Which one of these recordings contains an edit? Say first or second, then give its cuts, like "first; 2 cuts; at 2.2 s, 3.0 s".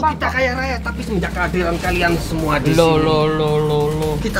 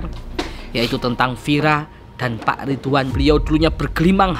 second; 1 cut; at 3.1 s